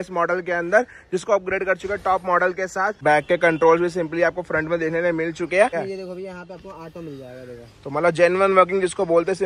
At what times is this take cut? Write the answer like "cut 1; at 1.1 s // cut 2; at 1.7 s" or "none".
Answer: cut 1; at 2.9 s // cut 2; at 5.7 s